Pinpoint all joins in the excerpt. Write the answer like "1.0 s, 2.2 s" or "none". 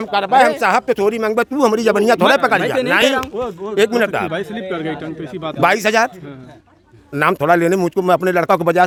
none